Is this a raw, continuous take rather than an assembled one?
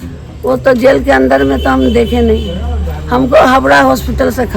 yes; 0 cuts

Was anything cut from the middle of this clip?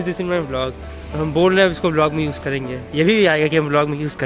no; 0 cuts

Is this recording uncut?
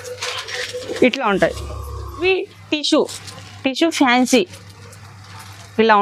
no; 1 cut; at 2.3 s

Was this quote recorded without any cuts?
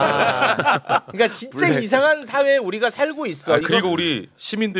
yes; 0 cuts

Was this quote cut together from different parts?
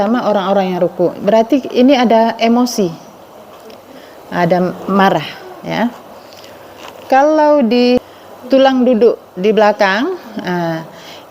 yes; 1 cut; at 8.0 s

